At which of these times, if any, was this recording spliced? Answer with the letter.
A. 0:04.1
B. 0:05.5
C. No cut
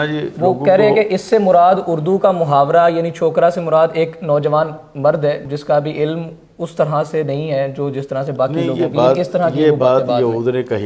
B